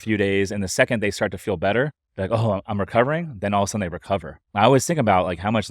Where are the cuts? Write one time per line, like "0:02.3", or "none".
0:04.4